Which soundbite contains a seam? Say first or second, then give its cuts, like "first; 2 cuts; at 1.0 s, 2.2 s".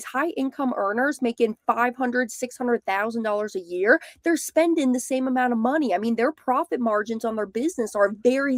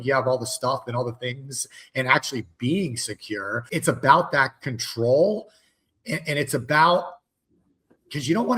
second; 1 cut; at 3.6 s